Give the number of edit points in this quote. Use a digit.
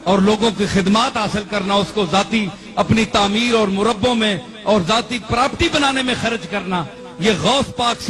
0